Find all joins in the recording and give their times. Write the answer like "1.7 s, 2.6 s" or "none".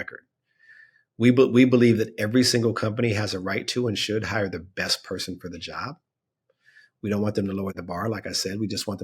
7.8 s